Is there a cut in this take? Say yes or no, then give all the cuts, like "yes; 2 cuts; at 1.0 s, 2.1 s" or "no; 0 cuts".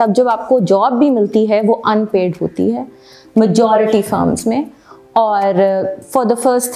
no; 0 cuts